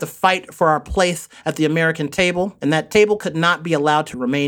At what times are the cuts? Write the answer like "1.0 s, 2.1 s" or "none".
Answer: 2.2 s